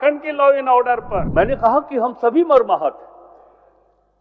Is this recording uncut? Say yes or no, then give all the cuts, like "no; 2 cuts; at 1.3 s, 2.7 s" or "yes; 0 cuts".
no; 1 cut; at 1.3 s